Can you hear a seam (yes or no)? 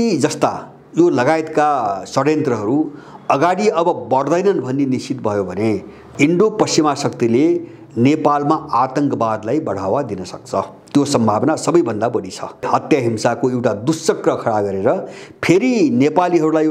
yes